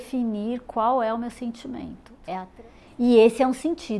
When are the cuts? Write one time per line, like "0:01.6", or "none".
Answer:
0:02.5